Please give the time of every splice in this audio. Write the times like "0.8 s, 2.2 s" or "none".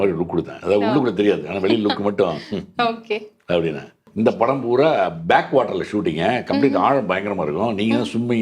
4.0 s